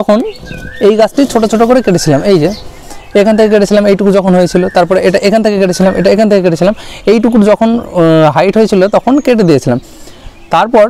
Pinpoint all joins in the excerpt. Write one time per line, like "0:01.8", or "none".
none